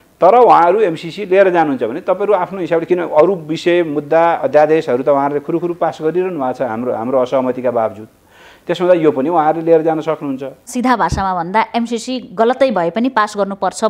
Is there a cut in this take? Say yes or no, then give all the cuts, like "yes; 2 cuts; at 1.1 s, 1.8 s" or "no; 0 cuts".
yes; 1 cut; at 10.7 s